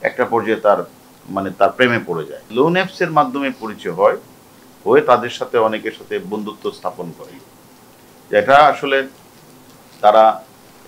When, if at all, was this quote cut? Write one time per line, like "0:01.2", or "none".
0:02.4